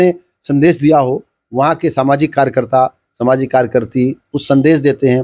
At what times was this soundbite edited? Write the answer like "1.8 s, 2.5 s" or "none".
none